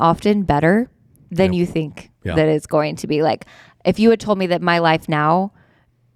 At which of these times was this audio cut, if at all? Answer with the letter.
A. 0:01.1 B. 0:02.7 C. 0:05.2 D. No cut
D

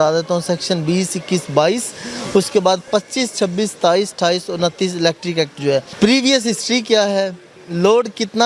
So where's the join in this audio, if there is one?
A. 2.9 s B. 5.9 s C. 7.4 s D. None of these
B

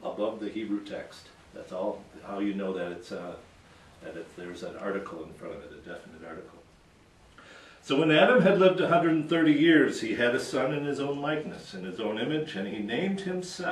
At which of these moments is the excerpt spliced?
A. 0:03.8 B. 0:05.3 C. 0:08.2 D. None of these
D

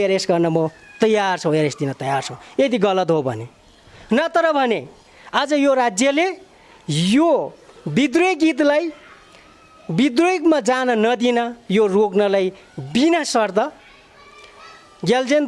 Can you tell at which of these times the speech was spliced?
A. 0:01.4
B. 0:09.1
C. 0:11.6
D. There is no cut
D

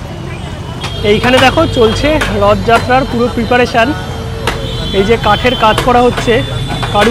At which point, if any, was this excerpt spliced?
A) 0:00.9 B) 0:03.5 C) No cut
A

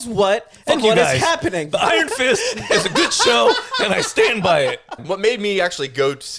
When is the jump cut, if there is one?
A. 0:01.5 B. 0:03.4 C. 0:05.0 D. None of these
C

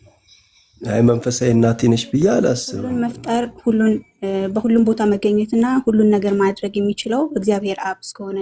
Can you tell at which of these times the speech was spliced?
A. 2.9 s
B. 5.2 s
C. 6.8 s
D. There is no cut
A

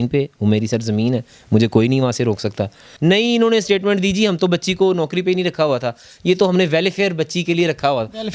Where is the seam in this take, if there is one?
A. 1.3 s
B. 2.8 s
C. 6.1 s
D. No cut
B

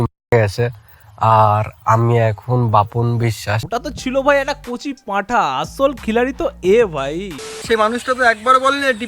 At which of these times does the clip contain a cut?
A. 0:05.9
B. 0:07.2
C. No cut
B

